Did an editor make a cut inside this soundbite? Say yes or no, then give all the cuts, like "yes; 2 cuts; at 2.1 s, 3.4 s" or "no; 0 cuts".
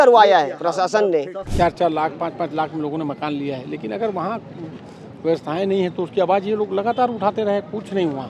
yes; 1 cut; at 1.4 s